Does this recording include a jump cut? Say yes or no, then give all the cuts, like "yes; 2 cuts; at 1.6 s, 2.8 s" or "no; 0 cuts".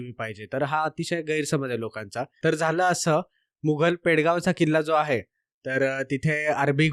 yes; 1 cut; at 2.3 s